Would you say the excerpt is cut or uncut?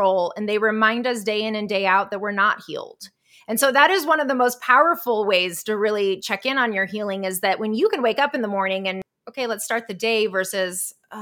cut